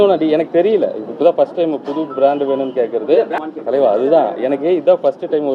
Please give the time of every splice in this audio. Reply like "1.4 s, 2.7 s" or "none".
3.4 s